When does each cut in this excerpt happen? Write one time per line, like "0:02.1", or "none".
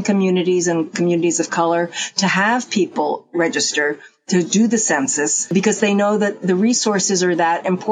0:05.4